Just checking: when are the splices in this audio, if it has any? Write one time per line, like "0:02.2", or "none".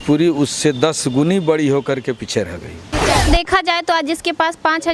0:03.2